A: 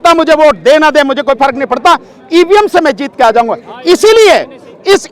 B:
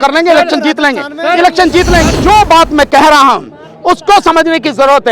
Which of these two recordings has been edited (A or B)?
B